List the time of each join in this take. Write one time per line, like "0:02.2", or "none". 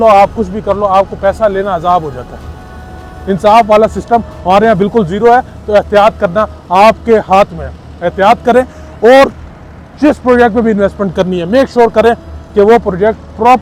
none